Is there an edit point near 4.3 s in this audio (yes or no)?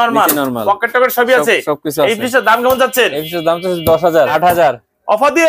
yes